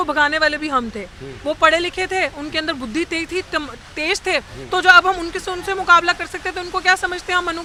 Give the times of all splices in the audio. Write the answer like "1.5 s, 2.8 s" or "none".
none

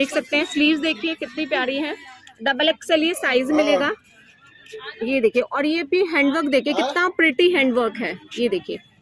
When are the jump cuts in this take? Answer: none

